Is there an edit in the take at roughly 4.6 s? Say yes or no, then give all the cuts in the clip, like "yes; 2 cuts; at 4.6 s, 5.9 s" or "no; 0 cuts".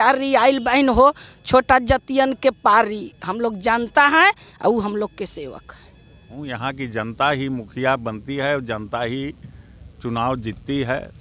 no; 1 cut; at 6.3 s